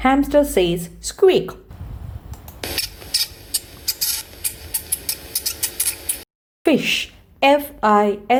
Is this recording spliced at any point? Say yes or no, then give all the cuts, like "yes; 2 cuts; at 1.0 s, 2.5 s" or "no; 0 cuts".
no; 0 cuts